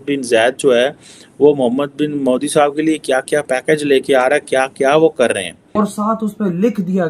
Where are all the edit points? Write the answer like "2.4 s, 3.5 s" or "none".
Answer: 5.8 s